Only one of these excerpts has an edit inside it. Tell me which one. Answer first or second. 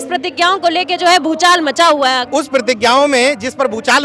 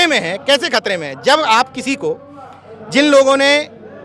first